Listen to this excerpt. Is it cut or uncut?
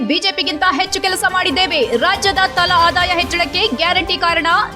uncut